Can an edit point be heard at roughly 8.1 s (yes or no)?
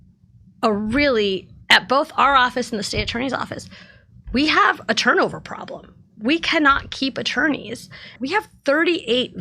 yes